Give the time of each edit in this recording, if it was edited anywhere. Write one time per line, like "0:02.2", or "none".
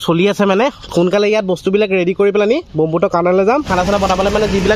0:03.7